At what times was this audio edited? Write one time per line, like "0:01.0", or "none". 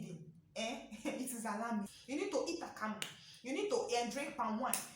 0:02.0